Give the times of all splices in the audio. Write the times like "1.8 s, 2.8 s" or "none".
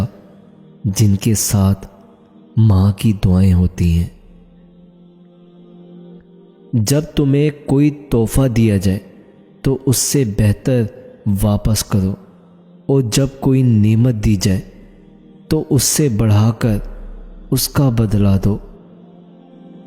18.8 s